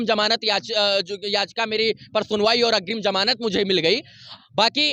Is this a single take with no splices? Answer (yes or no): yes